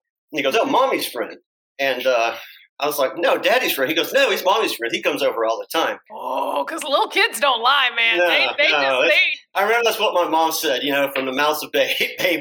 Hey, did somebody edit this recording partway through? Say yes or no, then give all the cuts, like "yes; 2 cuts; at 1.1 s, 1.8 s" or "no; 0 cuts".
yes; 1 cut; at 6.1 s